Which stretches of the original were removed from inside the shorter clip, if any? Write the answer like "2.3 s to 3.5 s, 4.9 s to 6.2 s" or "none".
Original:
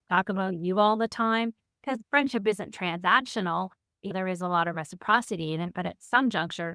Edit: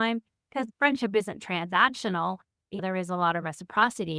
none